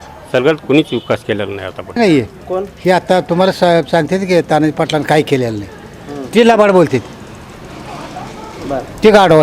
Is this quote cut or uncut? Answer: cut